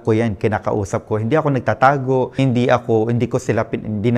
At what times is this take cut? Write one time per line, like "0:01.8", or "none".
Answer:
0:02.3